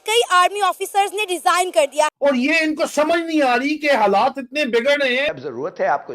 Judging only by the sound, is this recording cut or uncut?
cut